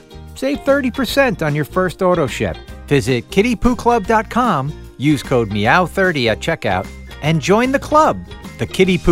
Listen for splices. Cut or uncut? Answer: uncut